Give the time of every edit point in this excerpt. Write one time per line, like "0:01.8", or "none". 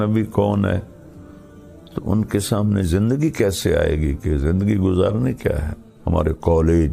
0:05.8